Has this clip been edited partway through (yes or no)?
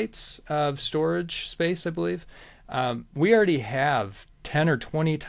no